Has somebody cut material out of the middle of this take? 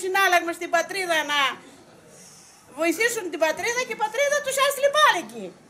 no; 0 cuts

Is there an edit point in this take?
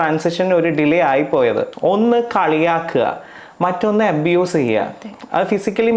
yes; 1 cut; at 1.7 s

